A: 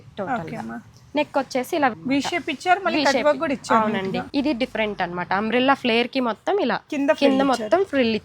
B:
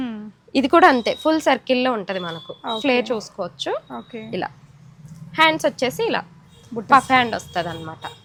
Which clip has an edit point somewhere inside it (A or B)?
A